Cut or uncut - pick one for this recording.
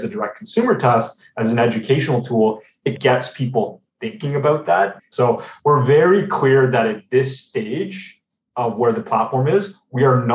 cut